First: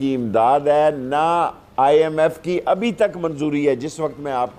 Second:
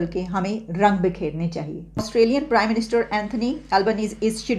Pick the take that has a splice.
second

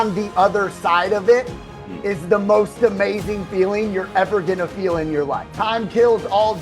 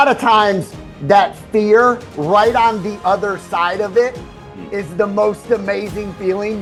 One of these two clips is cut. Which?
first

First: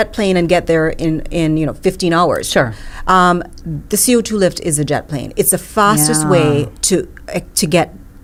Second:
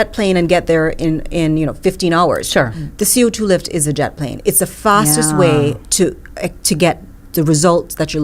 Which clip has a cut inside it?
second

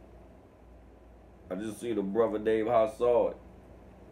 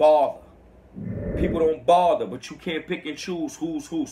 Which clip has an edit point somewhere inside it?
first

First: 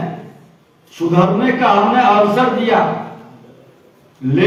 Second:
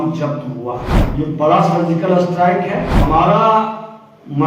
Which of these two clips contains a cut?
second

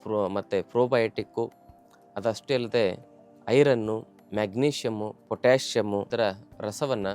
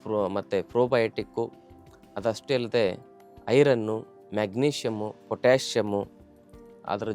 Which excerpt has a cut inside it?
first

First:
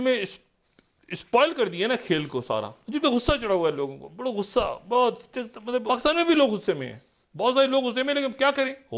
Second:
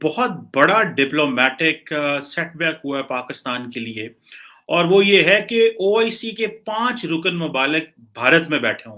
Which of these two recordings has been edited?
first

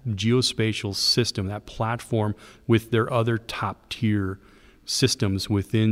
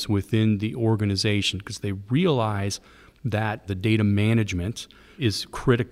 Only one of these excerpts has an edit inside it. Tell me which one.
second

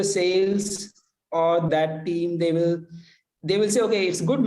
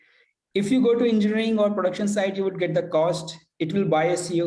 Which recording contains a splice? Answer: first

